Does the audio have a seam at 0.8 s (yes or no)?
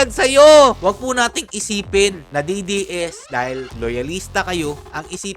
yes